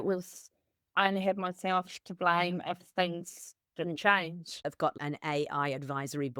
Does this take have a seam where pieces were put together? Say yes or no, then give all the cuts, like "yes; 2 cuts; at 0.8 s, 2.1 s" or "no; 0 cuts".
yes; 1 cut; at 5.0 s